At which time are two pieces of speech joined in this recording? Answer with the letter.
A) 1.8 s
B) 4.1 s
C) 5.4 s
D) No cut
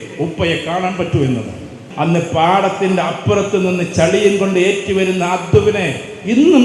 A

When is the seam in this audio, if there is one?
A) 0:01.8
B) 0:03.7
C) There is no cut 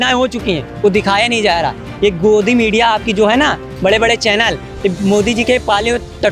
C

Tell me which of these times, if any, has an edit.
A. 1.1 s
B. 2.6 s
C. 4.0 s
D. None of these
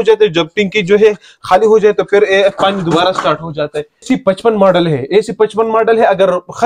C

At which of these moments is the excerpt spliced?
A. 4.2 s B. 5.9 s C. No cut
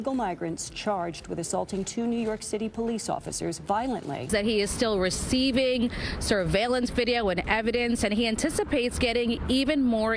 A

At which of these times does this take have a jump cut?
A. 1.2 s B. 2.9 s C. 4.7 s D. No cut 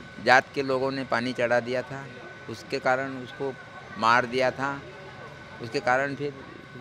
D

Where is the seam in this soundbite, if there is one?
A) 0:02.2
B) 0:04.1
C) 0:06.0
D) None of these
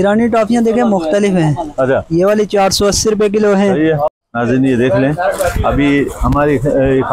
B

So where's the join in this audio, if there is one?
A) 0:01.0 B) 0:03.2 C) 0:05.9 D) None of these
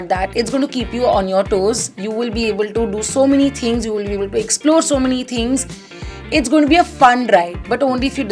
D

